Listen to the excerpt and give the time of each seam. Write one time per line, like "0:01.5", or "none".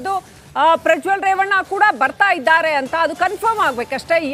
none